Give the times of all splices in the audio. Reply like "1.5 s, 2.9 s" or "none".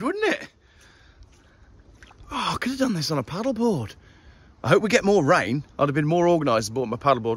none